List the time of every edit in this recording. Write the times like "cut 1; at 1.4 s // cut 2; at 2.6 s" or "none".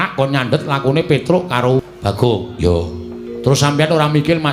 cut 1; at 1.9 s